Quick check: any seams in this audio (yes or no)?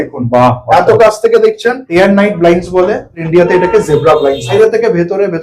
yes